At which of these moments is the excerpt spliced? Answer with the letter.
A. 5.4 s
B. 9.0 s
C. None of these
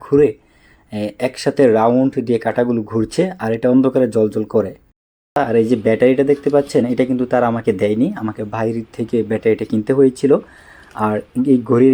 A